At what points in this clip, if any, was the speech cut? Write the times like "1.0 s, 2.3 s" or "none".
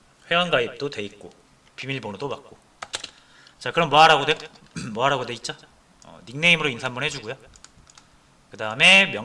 0.9 s